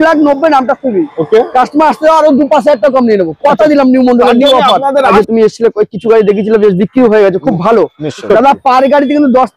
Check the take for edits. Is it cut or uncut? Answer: cut